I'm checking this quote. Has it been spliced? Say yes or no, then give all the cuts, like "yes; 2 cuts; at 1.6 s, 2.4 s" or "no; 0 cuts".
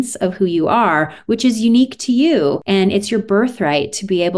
yes; 1 cut; at 2.6 s